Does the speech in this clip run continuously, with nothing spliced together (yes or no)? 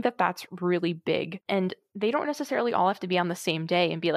no